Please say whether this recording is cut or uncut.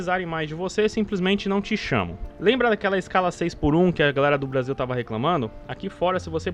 cut